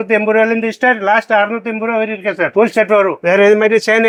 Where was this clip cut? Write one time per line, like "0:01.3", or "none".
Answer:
none